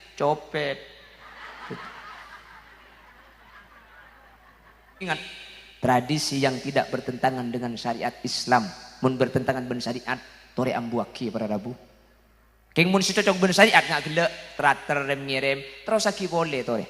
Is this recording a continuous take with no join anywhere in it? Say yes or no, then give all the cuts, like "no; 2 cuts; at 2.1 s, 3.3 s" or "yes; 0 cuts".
no; 1 cut; at 5.1 s